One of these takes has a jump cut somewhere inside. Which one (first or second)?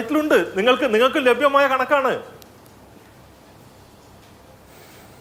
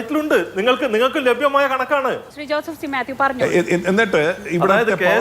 second